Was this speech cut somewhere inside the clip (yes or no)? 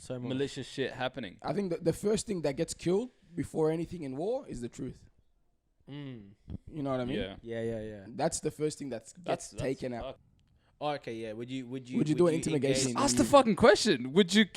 yes